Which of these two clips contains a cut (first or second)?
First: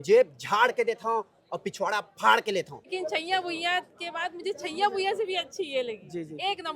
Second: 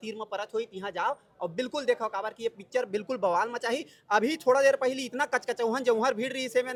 first